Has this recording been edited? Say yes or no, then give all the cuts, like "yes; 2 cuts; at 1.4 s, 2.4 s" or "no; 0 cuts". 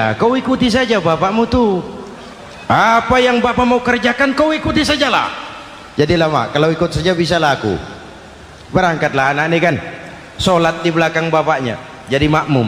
no; 0 cuts